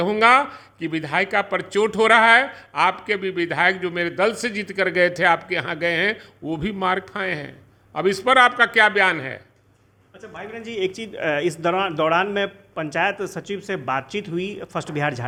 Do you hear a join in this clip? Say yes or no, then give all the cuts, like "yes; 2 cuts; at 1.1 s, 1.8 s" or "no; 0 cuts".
no; 0 cuts